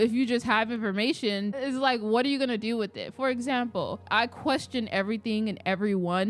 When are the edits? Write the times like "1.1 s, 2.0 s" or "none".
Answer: 4.0 s